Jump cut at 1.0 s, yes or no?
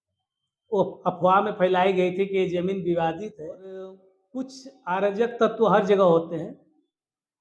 no